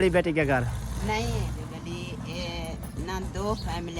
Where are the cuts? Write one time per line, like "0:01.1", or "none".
0:01.6